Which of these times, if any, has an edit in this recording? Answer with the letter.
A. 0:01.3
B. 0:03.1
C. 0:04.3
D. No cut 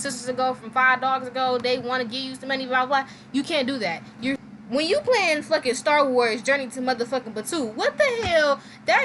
C